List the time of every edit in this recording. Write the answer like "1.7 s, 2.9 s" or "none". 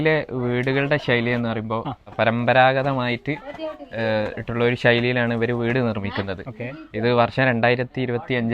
2.0 s